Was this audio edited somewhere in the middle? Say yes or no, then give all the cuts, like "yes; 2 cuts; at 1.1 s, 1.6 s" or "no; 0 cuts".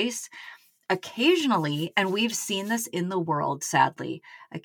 no; 0 cuts